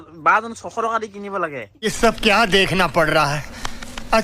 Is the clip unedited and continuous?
no; 1 cut; at 1.7 s

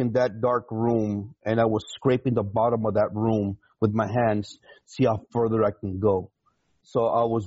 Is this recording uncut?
yes; 0 cuts

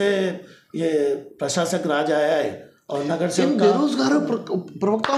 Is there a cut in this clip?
no; 0 cuts

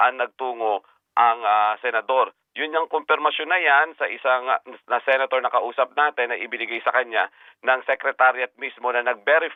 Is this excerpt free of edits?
yes; 0 cuts

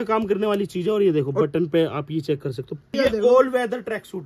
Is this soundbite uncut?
no; 1 cut; at 2.9 s

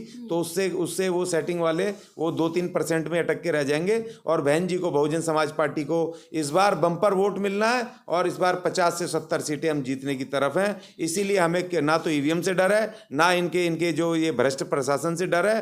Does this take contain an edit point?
no; 0 cuts

